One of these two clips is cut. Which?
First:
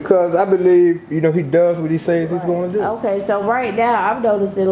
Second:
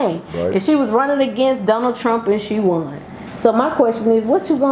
first; 1 cut; at 2.9 s

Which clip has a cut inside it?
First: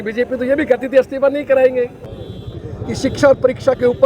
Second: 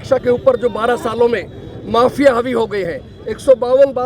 first; 1 cut; at 2.0 s

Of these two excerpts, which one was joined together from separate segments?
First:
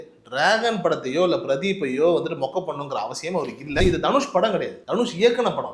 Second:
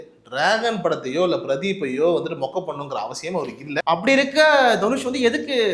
first; 1 cut; at 3.8 s

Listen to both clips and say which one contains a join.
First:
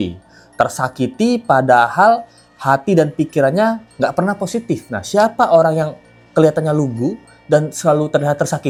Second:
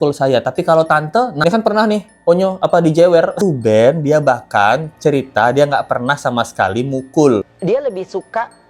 second; 3 cuts; at 1.3 s, 3.4 s, 7.5 s

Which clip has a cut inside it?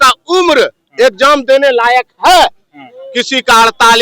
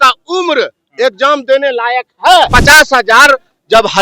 second; 1 cut; at 2.5 s

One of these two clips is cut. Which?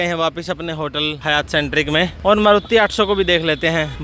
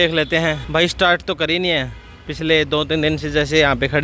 first; 2 cuts; at 1.2 s, 2.1 s

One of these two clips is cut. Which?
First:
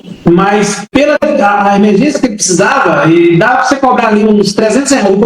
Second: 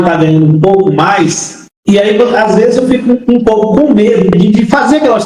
second; 1 cut; at 4.3 s

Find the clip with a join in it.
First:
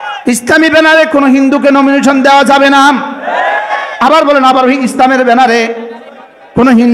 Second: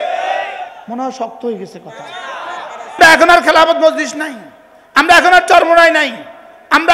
second; 1 cut; at 3.0 s

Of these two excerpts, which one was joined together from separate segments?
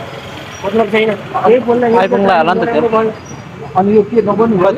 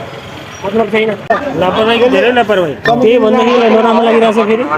second; 1 cut; at 1.2 s

